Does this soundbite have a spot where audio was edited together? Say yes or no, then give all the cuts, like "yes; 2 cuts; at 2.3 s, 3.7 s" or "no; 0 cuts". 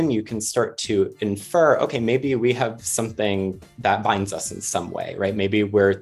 no; 0 cuts